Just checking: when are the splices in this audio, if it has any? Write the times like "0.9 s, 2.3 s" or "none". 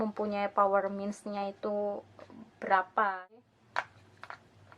3.3 s